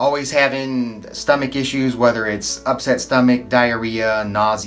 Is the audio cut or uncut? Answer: uncut